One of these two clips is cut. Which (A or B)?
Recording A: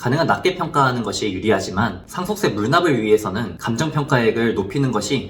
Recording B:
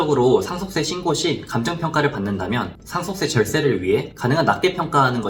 A